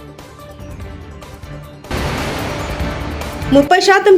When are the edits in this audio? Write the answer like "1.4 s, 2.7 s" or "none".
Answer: 1.6 s